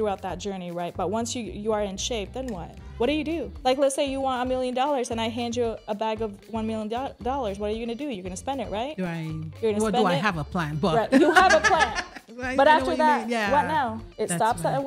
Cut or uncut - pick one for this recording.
cut